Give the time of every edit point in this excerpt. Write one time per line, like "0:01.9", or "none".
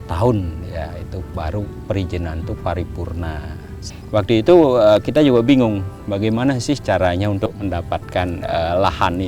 0:03.9